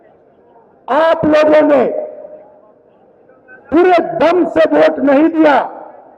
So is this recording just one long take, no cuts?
yes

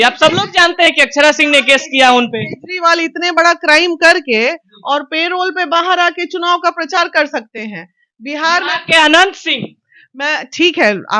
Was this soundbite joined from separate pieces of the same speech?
no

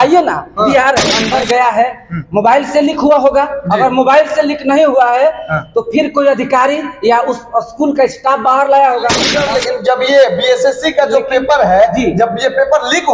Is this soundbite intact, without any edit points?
no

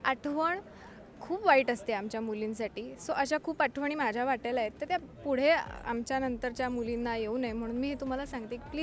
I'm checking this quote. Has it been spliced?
no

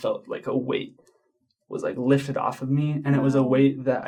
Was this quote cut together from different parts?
no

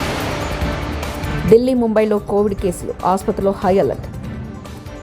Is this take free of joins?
no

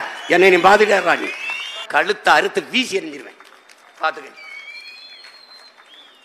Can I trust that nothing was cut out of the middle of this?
no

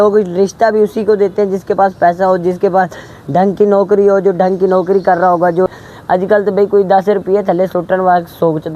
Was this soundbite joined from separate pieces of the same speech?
yes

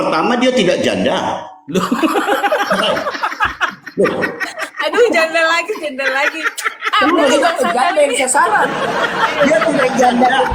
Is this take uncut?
yes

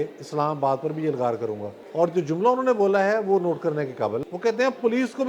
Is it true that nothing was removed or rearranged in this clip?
no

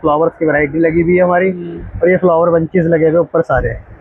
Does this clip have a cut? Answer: no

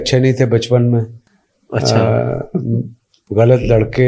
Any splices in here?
no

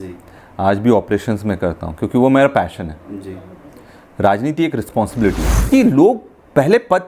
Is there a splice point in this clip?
yes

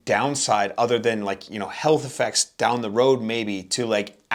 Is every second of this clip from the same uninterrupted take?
yes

